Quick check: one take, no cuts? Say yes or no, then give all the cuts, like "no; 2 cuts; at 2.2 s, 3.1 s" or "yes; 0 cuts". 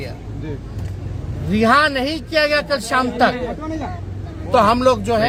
yes; 0 cuts